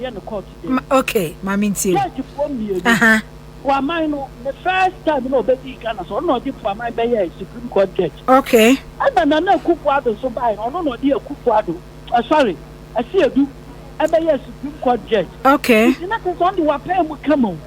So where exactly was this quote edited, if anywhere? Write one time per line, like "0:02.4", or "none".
0:15.8